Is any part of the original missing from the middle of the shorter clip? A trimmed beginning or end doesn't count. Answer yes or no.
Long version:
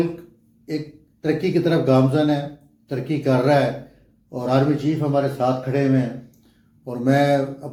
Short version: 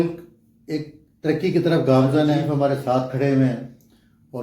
yes